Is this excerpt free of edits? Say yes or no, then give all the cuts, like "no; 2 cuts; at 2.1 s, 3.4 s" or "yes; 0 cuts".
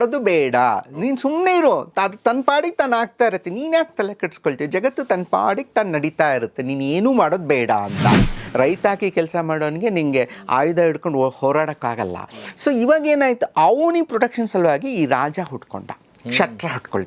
no; 1 cut; at 8.4 s